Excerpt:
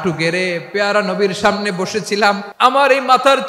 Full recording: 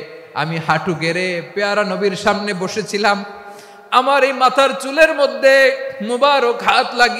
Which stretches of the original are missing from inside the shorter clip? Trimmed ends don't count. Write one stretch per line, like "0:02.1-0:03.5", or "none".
0:03.3-0:03.8

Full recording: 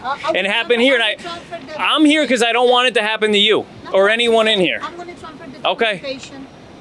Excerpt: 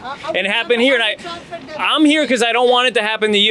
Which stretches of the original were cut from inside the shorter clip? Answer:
none

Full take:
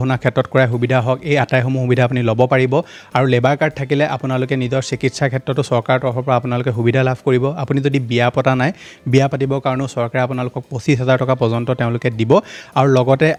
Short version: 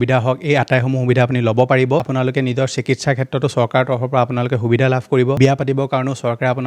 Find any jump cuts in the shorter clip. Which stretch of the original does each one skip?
0:02.9-0:04.2
0:07.5-0:09.1

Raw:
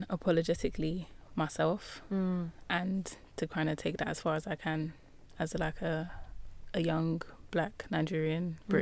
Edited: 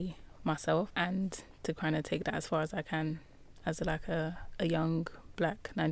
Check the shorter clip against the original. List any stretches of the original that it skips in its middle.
0:01.8-0:02.6
0:06.2-0:06.6

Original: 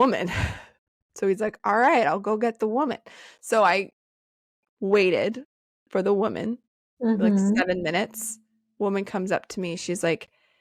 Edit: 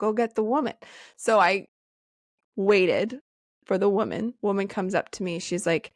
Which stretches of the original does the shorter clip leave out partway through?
0:06.6-0:08.7

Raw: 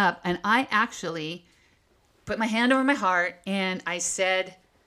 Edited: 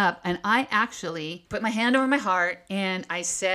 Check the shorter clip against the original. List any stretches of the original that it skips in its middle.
0:01.4-0:02.1

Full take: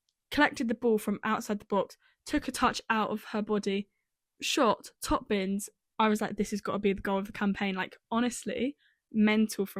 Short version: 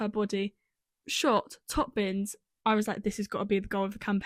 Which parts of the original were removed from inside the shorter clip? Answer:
none

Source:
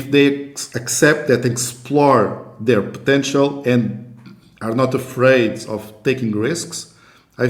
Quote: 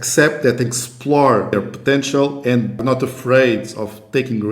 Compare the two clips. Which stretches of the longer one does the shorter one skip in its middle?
0:02.4-0:02.7
0:04.0-0:04.7

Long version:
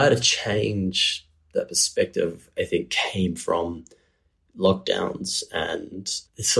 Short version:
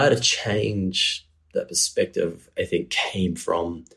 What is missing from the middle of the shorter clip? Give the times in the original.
none

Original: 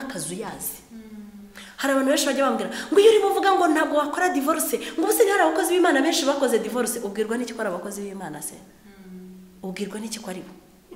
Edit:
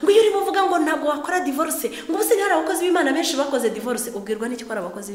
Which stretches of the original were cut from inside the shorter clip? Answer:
none

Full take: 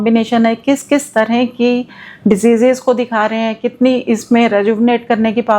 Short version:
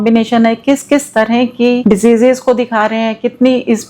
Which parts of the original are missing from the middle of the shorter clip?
0:01.8-0:02.2

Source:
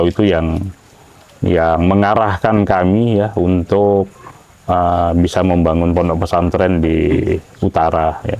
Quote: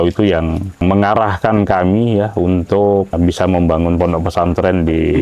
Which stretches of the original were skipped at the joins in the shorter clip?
0:00.8-0:01.8
0:04.1-0:05.1

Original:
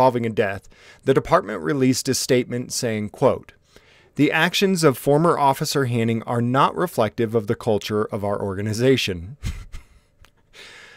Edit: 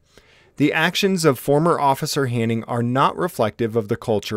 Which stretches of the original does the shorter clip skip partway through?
none

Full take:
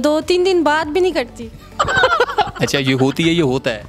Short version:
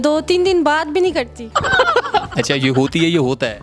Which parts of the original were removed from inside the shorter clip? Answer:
0:01.4-0:01.7

